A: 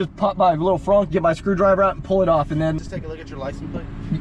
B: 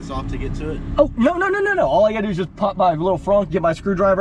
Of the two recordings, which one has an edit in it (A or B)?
A